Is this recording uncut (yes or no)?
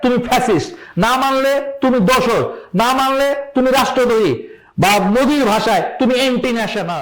yes